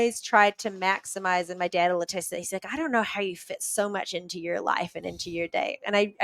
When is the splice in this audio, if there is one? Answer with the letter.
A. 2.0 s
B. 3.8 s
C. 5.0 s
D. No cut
D